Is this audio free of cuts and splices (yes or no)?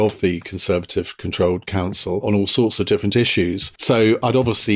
no